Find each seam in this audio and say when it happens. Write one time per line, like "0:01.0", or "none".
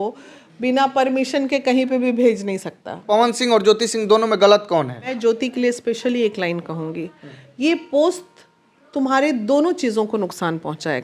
0:03.0
0:05.1